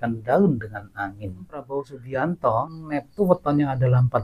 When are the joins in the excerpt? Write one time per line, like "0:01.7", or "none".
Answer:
0:01.6
0:02.7